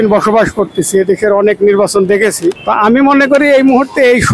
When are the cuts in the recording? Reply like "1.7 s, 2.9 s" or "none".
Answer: 2.6 s